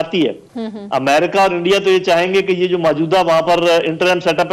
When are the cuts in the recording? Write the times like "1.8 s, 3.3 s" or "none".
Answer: none